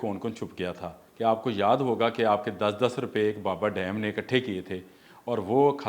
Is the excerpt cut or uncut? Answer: cut